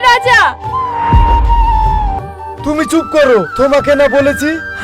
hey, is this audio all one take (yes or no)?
no